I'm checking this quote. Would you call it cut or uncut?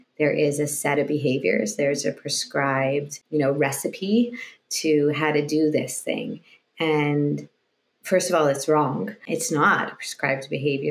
cut